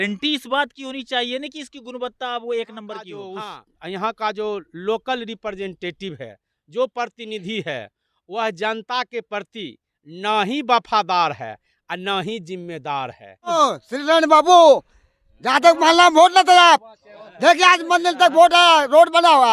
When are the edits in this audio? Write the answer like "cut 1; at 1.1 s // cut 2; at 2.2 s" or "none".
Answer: cut 1; at 3.3 s // cut 2; at 13.5 s